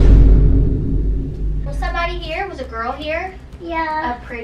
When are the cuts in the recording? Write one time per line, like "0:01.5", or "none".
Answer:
0:01.7

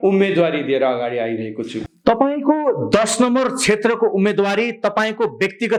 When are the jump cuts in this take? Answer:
none

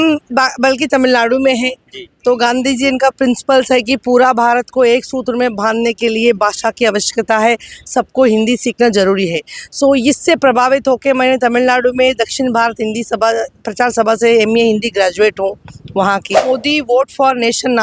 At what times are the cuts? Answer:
0:16.4

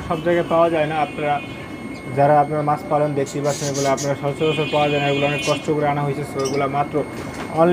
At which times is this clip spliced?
none

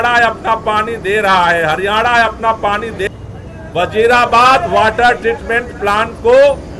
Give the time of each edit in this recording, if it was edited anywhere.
0:03.1

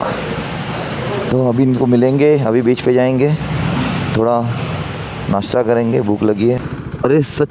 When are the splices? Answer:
0:06.5

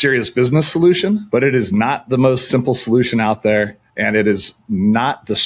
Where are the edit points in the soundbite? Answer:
0:01.2

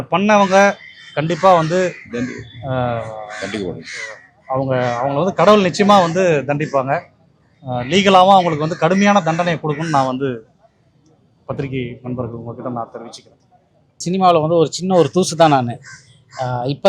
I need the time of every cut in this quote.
0:14.0

